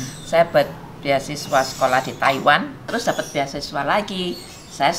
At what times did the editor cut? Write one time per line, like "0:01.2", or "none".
0:02.9